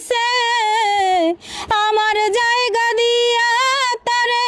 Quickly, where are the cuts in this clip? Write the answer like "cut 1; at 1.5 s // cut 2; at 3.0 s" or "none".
none